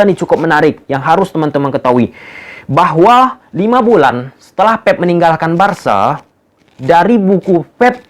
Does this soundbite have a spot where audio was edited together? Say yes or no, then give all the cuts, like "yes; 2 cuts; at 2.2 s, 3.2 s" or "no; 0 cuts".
no; 0 cuts